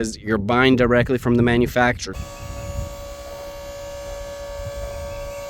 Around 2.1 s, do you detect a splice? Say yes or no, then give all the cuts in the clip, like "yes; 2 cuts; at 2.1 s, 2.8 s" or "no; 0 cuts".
yes; 1 cut; at 2.1 s